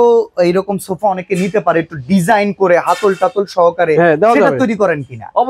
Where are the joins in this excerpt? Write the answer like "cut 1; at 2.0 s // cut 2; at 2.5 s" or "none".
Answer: none